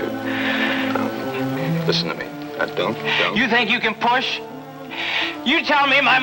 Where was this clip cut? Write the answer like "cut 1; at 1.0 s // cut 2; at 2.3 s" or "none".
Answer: none